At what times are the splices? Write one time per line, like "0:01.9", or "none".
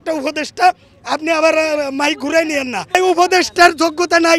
0:02.9